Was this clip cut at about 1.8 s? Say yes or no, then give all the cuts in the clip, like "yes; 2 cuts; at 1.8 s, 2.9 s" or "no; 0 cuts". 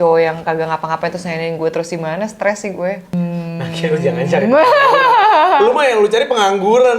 no; 1 cut; at 3.1 s